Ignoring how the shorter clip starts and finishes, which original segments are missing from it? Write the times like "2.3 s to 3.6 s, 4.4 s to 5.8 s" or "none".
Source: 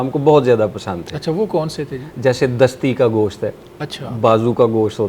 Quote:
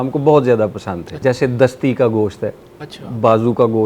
1.0 s to 2.0 s